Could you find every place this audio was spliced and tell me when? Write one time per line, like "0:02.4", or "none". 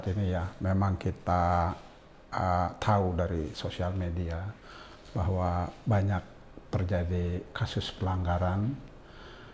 none

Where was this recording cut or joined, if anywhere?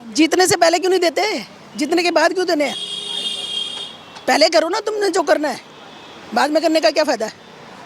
none

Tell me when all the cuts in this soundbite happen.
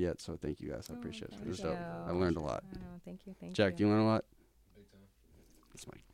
none

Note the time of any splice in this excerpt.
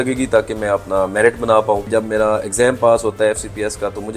0:01.9

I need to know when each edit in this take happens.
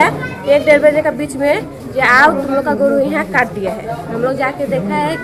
none

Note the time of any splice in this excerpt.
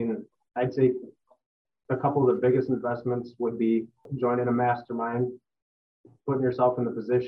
0:04.1

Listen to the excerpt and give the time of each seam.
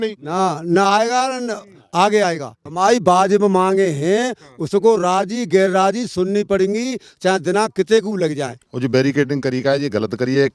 0:02.6
0:08.6

